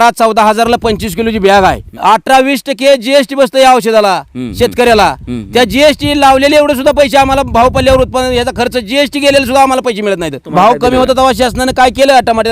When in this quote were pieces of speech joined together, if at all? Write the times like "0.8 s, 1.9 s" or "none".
1.9 s, 10.4 s